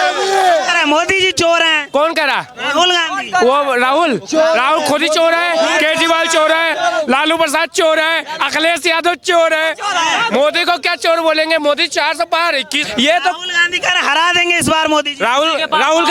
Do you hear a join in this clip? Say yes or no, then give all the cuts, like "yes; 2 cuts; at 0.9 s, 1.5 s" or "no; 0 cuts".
no; 0 cuts